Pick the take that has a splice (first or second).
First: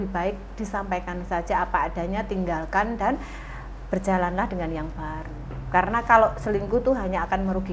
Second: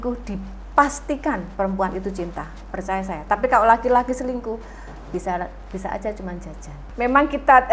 second